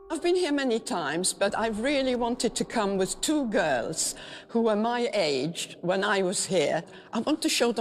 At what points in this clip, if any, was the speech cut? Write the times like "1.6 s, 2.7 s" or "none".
1.0 s